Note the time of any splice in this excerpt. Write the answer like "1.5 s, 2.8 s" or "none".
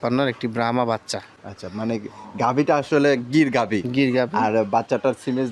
none